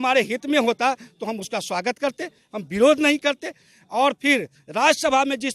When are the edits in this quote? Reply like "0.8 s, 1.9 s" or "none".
none